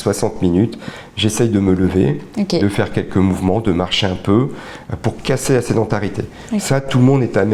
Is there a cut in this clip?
no; 0 cuts

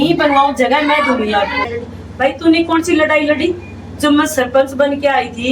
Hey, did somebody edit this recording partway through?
yes; 1 cut; at 1.8 s

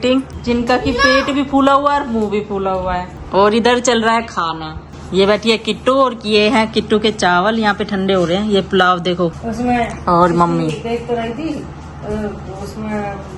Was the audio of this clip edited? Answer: no; 0 cuts

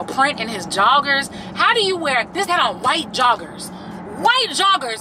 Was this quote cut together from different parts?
yes; 1 cut; at 2.5 s

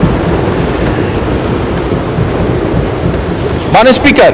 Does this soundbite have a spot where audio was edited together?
yes; 1 cut; at 2.2 s

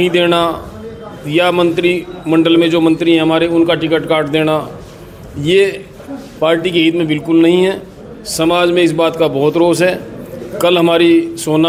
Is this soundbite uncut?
yes; 0 cuts

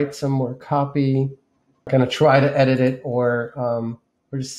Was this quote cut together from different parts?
yes; 1 cut; at 1.9 s

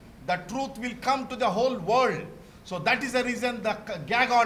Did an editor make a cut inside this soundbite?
no; 0 cuts

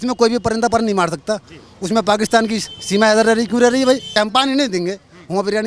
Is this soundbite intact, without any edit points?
no; 1 cut; at 4.1 s

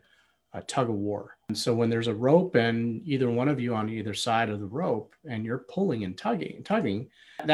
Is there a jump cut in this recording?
yes; 1 cut; at 1.5 s

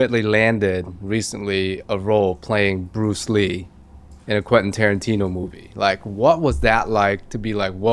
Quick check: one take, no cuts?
yes; 0 cuts

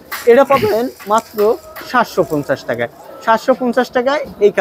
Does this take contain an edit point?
no; 0 cuts

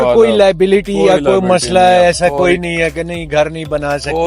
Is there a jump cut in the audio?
no; 0 cuts

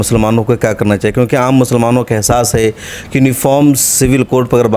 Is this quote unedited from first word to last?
yes; 0 cuts

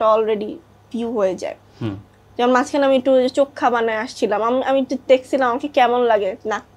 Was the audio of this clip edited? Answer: no; 0 cuts

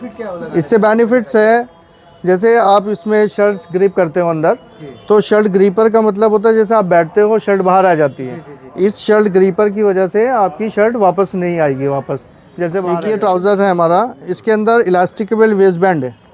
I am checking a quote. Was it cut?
yes; 1 cut; at 12.8 s

